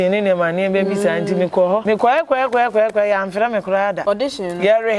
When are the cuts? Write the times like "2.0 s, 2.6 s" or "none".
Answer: 1.8 s, 4.0 s